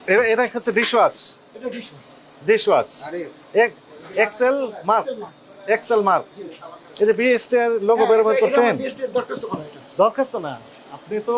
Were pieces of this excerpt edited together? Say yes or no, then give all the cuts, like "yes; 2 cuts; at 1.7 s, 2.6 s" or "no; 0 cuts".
no; 0 cuts